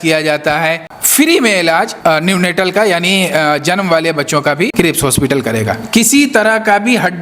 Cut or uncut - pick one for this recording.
cut